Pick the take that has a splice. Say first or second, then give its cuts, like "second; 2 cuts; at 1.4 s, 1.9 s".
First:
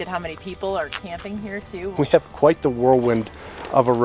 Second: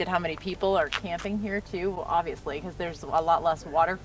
first; 1 cut; at 1.9 s